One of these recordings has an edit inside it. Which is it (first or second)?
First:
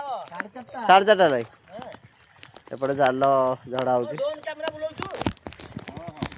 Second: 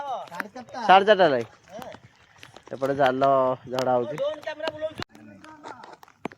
second